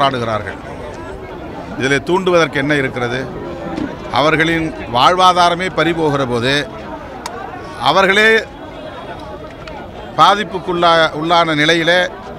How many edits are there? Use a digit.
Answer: 0